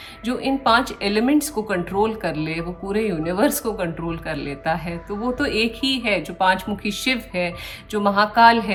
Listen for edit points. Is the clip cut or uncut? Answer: uncut